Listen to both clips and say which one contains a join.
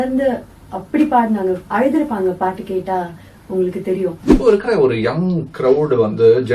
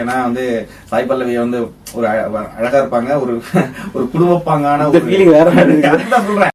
first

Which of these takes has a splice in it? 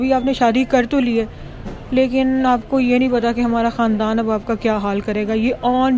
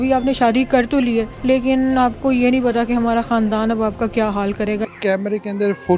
second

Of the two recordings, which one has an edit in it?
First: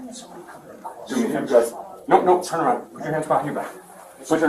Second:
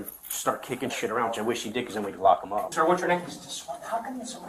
second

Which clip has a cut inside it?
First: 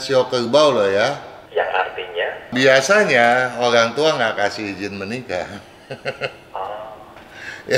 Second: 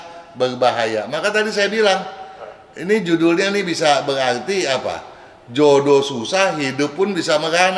first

